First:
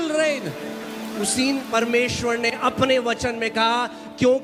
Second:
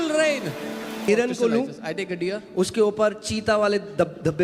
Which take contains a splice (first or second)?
second